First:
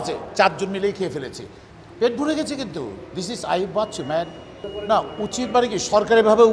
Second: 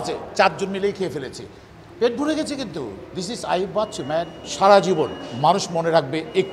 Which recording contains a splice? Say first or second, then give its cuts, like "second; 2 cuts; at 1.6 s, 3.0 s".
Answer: second; 1 cut; at 4.4 s